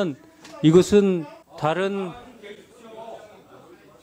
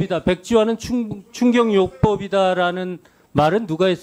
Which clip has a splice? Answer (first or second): first